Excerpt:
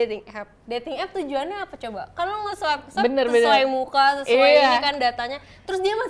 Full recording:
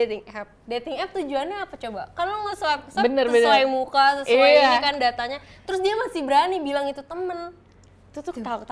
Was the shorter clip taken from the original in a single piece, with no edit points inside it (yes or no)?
yes